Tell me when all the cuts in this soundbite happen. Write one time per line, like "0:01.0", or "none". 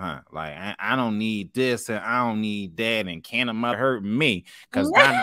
0:03.8